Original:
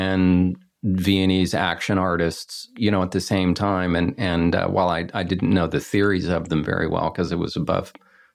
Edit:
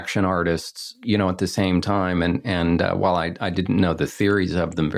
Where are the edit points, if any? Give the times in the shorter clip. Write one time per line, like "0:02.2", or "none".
none